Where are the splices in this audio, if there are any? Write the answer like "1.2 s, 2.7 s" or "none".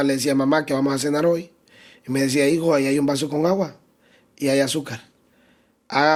none